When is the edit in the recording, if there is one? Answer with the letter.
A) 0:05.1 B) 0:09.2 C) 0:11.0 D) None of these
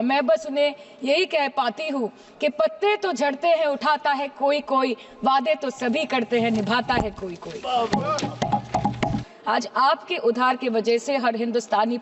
B